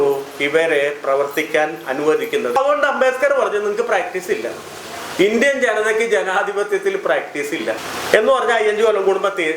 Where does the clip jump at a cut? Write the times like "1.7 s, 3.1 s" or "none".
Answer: 2.6 s, 7.9 s